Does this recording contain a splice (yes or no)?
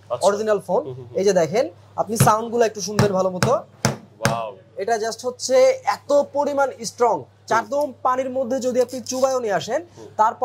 yes